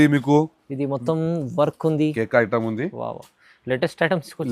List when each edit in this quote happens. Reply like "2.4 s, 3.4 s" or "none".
2.1 s